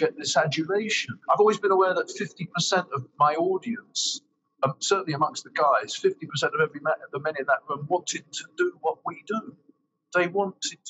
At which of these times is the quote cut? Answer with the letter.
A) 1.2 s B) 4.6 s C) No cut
A